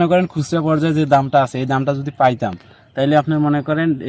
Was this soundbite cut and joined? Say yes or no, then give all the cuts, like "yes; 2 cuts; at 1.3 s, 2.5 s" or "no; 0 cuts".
no; 0 cuts